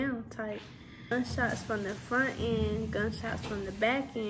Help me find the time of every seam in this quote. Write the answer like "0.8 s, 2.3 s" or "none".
1.1 s